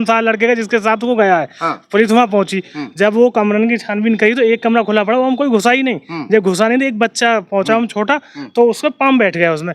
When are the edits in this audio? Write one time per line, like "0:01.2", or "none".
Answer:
none